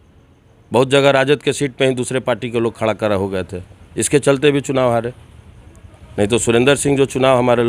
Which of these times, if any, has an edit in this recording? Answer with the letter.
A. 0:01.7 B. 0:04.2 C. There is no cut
C